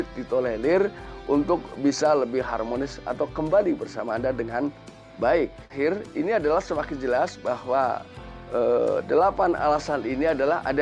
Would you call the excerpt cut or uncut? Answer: cut